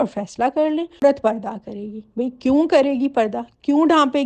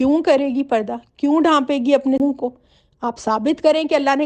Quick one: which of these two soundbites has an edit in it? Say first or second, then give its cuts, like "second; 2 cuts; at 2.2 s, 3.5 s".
first; 1 cut; at 1.0 s